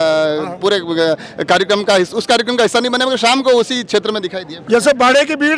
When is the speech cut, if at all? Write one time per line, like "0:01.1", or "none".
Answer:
0:04.6